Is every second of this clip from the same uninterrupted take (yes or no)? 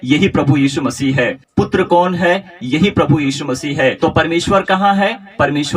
no